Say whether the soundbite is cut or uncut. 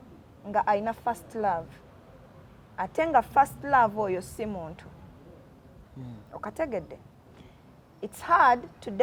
uncut